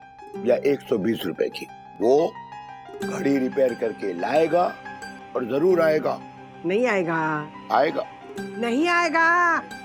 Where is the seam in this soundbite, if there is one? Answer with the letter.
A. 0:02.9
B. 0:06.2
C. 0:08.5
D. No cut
D